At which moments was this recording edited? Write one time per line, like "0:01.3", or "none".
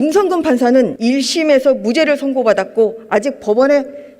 0:00.9